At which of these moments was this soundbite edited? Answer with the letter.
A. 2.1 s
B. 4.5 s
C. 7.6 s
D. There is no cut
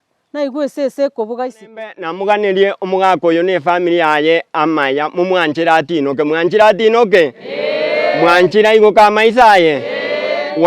A